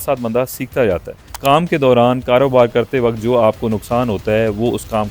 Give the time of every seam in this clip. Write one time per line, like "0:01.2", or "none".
0:01.2